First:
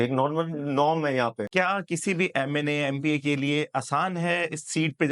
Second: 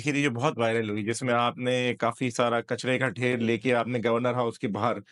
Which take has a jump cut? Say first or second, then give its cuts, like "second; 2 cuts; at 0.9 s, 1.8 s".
first; 1 cut; at 1.5 s